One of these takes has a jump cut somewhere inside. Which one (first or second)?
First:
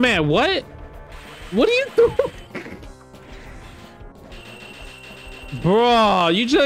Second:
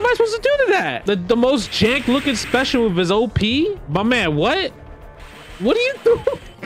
first